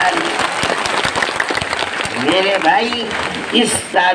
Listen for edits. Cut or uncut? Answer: uncut